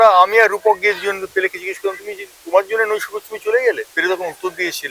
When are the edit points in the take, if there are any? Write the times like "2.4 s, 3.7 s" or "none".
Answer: 3.9 s